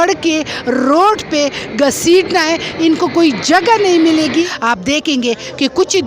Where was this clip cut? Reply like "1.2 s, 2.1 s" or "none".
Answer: 4.5 s